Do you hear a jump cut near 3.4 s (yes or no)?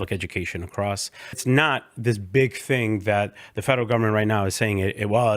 no